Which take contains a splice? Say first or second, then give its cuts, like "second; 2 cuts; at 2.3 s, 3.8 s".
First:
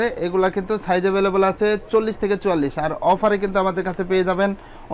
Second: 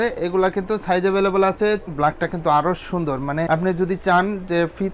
second; 1 cut; at 1.8 s